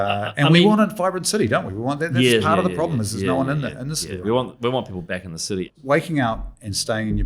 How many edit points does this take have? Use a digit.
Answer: 1